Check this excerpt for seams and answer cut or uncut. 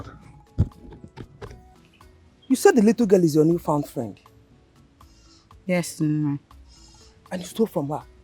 cut